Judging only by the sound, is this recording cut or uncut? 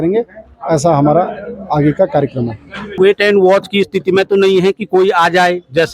cut